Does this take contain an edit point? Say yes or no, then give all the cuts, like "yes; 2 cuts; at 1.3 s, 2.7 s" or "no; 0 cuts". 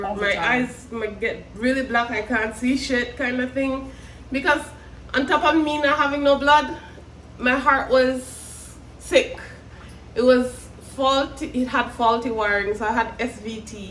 no; 0 cuts